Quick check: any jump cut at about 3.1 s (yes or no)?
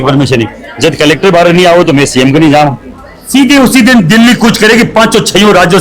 yes